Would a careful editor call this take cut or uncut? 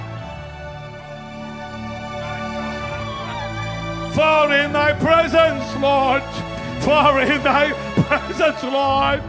cut